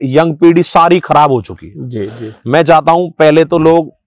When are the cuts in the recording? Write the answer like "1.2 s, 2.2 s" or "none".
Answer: none